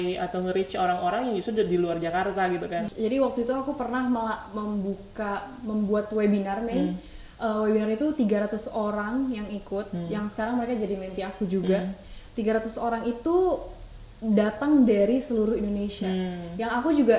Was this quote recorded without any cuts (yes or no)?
no